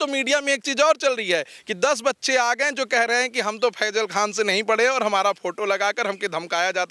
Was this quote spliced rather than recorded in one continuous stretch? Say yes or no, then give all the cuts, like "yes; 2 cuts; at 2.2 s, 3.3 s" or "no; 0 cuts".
no; 0 cuts